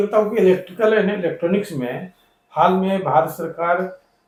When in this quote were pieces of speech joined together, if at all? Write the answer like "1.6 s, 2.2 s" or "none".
none